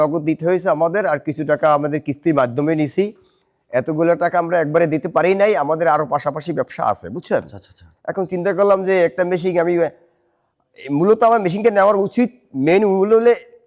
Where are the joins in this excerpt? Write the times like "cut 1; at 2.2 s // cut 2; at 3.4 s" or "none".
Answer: none